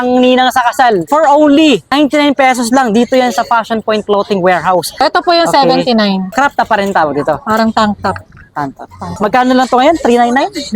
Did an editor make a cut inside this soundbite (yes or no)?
yes